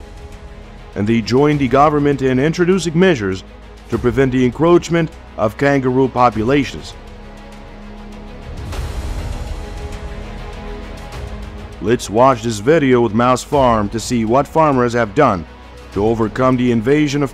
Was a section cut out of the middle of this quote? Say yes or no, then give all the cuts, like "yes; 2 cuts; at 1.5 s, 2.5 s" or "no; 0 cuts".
no; 0 cuts